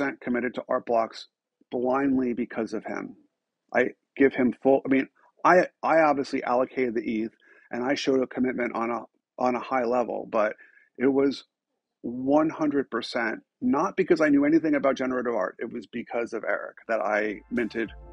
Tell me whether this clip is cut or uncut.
uncut